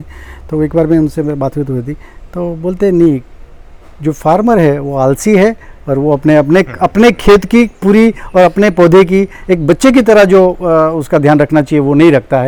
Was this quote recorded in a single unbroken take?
yes; 0 cuts

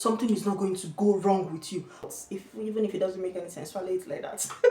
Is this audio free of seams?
no; 1 cut; at 2.0 s

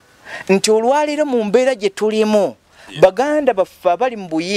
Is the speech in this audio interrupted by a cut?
no; 0 cuts

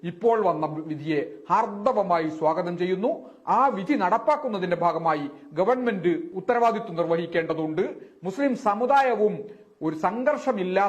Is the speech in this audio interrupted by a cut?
yes; 1 cut; at 6.3 s

